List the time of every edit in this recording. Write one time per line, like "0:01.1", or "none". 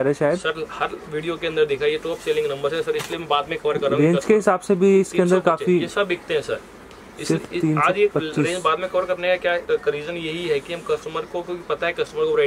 none